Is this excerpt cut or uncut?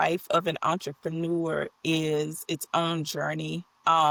uncut